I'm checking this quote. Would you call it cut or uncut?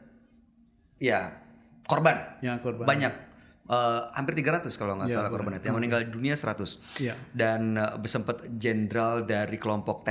uncut